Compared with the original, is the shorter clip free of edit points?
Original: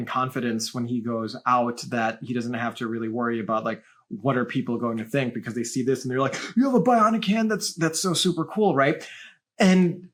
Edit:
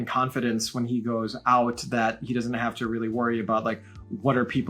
yes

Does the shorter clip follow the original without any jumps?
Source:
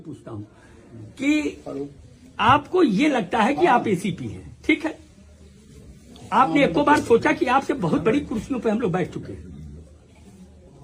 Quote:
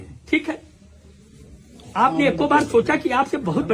yes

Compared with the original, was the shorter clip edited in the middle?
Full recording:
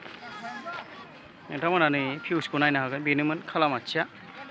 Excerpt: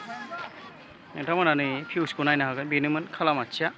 no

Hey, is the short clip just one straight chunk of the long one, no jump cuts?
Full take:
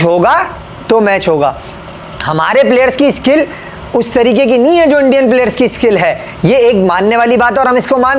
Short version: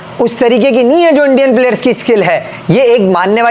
yes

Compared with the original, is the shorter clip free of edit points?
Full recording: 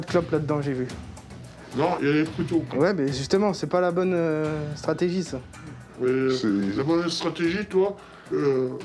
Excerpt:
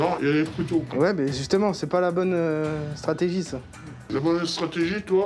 no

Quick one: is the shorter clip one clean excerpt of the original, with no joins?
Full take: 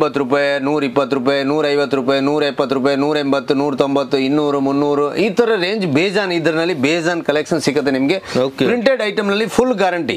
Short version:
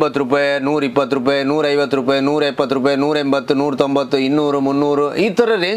yes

